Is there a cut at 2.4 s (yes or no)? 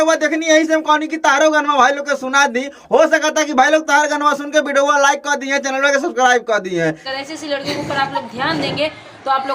no